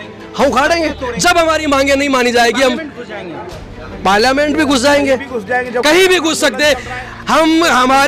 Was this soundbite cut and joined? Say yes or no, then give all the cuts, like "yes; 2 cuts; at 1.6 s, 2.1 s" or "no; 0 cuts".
no; 0 cuts